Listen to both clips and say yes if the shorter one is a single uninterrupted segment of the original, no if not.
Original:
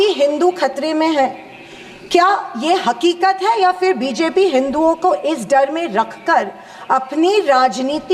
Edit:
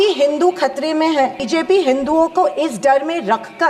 no